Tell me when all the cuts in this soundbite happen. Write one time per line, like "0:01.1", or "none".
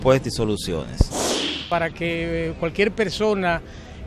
0:01.5